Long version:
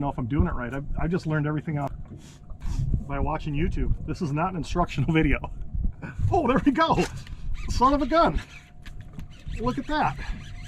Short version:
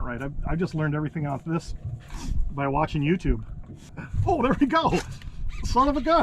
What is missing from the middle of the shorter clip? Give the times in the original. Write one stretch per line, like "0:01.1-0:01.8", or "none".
0:04.0-0:05.5

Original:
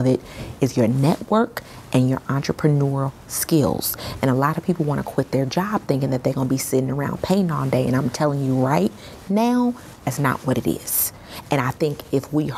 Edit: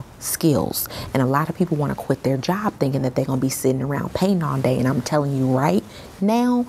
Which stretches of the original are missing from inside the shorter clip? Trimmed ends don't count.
none

